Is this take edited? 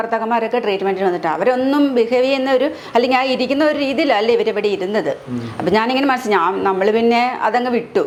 no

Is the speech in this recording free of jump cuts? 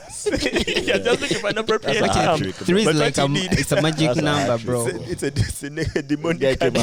yes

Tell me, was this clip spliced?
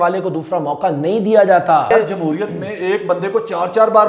yes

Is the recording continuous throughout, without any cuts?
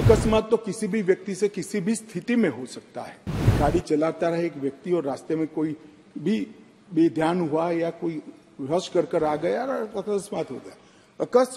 no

